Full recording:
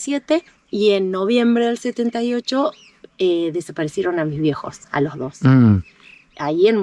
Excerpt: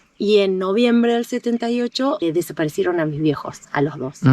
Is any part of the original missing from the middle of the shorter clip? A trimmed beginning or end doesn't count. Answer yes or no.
yes